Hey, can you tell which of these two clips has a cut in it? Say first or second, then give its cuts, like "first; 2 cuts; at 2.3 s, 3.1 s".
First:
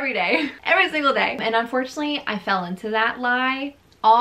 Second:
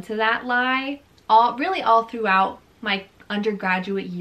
first; 1 cut; at 1.4 s